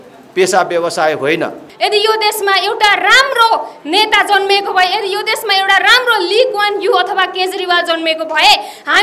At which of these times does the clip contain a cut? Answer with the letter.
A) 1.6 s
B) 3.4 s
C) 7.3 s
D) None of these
A